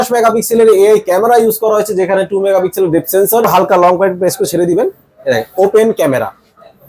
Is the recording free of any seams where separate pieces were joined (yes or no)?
no